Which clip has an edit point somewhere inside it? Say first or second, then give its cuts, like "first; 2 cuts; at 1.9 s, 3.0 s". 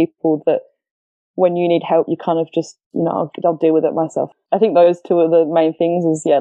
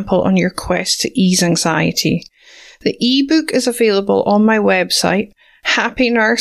first; 2 cuts; at 2.8 s, 4.3 s